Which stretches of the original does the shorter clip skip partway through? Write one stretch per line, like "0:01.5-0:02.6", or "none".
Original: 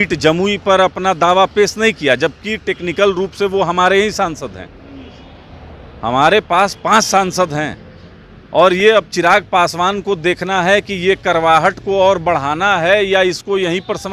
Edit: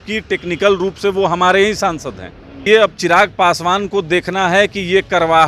0:05.0-0:08.8

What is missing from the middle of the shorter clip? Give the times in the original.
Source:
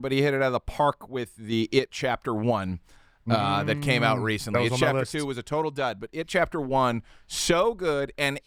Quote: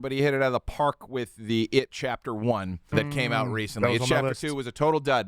0:02.9-0:03.6

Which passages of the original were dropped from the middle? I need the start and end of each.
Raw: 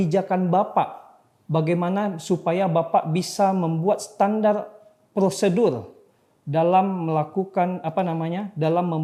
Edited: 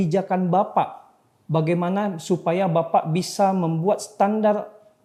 none

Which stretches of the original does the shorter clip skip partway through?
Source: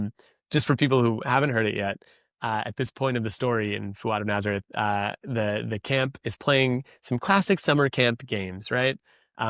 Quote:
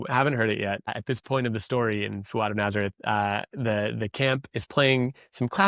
0:02.1-0:02.7

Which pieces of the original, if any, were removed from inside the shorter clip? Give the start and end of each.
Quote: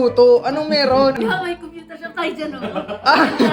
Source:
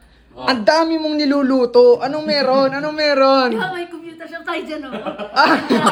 0:02.8-0:03.5

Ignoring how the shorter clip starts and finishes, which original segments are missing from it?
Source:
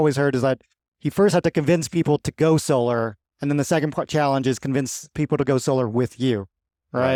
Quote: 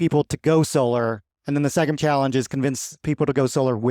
0:03.9-0:04.1

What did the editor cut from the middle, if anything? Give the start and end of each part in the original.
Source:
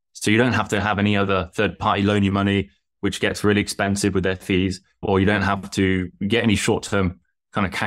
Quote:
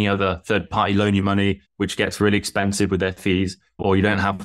0:02.7-0:02.9

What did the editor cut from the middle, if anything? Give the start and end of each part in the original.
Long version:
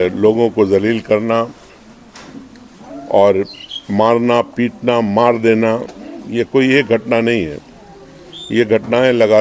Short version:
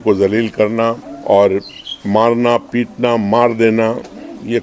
0:01.6-0:02.9

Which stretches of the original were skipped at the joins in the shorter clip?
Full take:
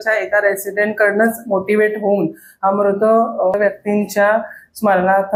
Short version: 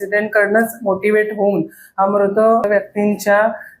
0:03.3-0:03.5

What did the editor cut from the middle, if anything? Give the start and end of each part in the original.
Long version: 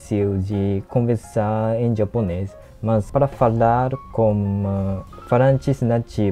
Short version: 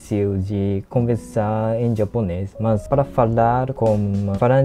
0:02.5-0:02.7
0:04.1-0:04.8

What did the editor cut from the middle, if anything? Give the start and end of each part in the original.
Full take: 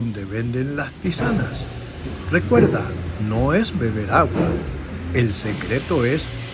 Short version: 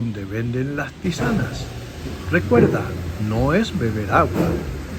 none

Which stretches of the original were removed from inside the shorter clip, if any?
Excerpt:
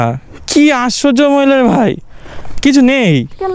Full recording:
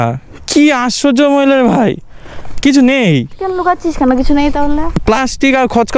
none

